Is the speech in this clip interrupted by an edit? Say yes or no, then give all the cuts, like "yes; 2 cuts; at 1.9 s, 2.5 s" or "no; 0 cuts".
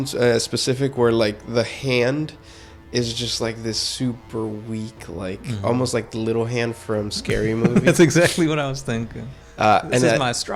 no; 0 cuts